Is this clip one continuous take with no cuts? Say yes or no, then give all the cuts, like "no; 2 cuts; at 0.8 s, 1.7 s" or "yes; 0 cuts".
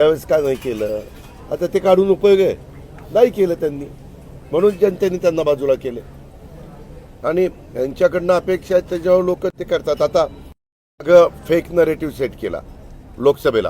yes; 0 cuts